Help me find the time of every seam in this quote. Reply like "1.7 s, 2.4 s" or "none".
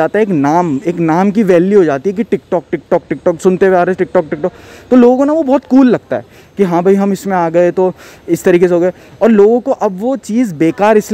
none

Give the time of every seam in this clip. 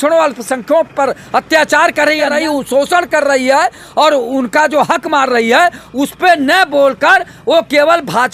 2.3 s

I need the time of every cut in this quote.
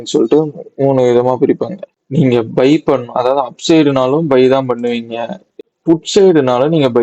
1.9 s

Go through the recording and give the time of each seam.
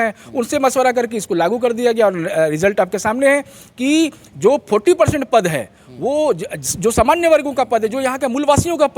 none

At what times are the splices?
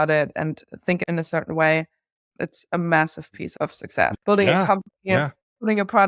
1.0 s, 2.1 s, 4.2 s

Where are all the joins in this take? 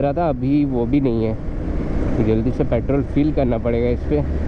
none

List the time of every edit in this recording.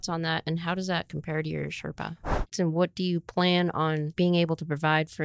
2.5 s, 4.1 s

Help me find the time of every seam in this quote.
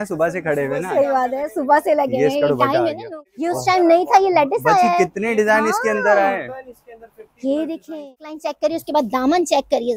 3.0 s, 8.5 s

